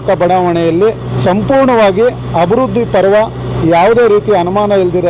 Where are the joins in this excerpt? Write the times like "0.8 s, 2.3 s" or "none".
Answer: 1.1 s